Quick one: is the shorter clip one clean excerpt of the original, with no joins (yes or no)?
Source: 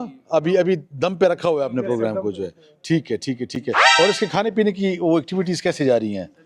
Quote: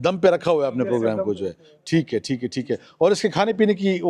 yes